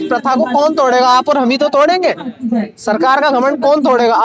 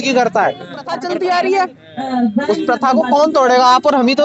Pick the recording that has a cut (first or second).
second